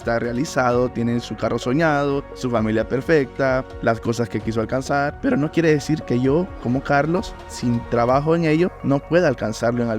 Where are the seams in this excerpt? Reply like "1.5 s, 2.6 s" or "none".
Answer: 2.3 s, 3.7 s, 5.1 s, 8.8 s